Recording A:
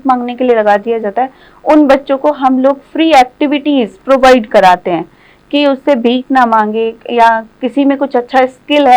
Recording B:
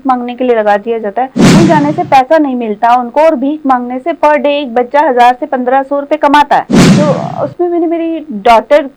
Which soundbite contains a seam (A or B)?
B